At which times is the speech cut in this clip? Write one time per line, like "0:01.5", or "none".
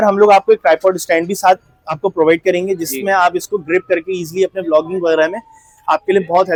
none